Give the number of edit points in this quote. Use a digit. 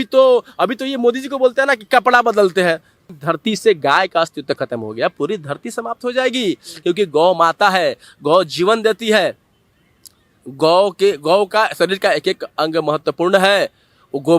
1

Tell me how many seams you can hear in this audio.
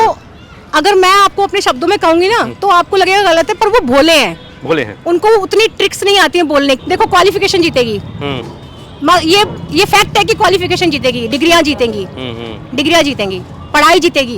1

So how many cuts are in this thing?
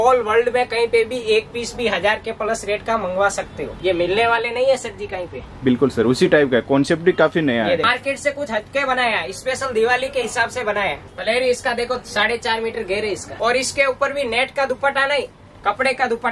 4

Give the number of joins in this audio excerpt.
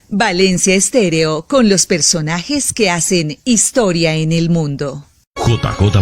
1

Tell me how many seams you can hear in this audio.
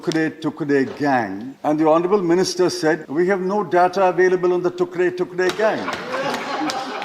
2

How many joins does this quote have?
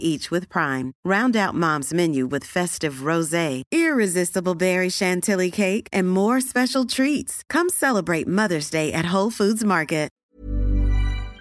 1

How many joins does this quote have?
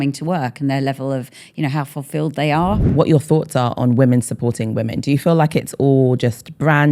1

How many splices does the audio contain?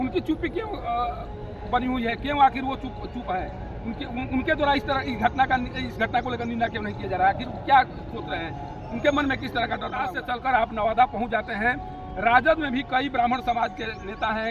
1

